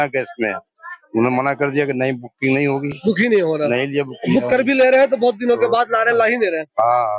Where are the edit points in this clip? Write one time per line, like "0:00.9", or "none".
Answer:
none